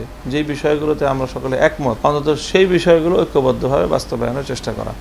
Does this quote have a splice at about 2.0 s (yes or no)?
yes